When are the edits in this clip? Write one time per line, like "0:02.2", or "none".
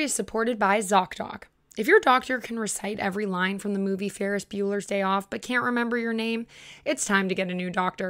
none